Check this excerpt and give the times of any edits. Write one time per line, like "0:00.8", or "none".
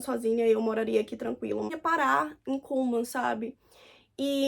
0:01.7

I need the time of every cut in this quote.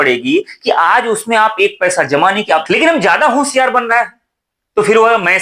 0:02.6

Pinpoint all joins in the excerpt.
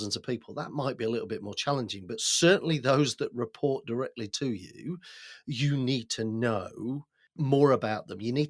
0:07.2

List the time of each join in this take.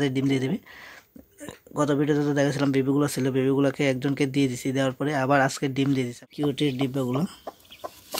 0:06.2

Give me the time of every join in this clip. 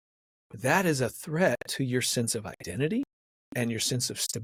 none

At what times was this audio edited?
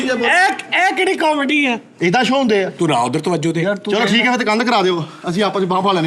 0:01.9

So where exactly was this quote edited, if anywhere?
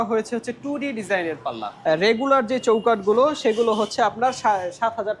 0:01.7

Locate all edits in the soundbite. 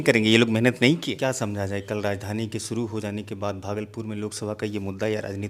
0:01.2

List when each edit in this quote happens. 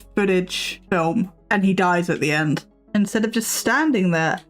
0:01.1
0:02.7

